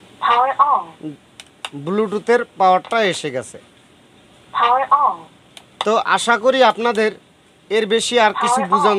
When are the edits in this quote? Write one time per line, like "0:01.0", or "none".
0:00.9